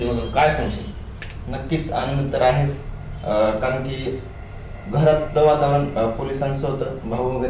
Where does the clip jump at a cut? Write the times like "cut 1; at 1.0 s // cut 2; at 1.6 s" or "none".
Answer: none